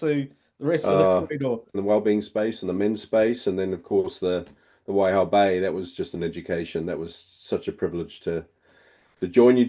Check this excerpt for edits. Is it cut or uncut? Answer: cut